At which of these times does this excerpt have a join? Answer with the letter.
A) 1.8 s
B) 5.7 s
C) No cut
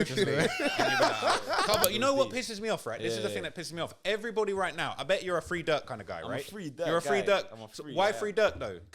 A